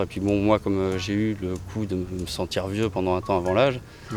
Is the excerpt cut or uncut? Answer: uncut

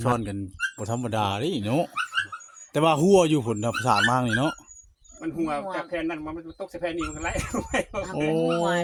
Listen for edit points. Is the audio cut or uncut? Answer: uncut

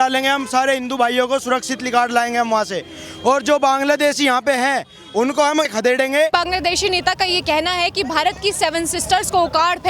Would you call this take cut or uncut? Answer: cut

